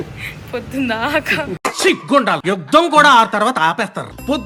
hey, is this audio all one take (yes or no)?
yes